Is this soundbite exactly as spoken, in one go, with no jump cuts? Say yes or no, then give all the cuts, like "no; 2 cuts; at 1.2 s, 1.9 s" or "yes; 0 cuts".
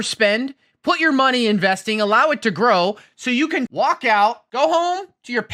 no; 2 cuts; at 3.7 s, 4.4 s